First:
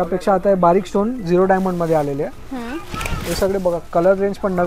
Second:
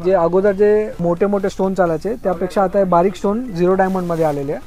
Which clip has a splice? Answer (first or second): second